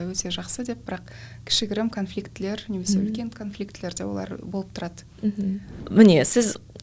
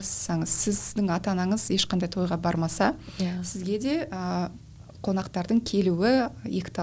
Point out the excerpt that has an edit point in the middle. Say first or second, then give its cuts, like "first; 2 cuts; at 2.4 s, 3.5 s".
first; 1 cut; at 5.8 s